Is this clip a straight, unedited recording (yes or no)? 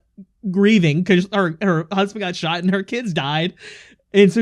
yes